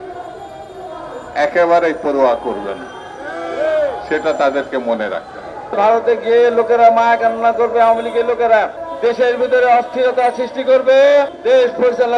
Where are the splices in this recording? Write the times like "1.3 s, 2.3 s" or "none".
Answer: 5.7 s, 8.8 s, 11.4 s